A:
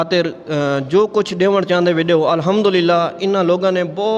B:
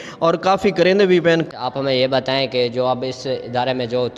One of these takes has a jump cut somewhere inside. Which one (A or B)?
B